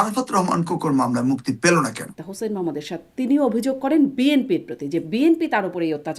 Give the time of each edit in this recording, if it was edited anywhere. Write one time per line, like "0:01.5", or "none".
0:02.2